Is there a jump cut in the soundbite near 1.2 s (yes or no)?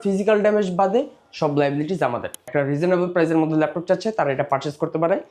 no